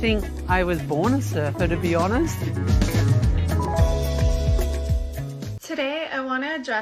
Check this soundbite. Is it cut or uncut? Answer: cut